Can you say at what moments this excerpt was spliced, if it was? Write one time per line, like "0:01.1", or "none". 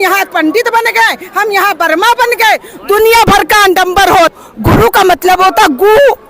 0:04.3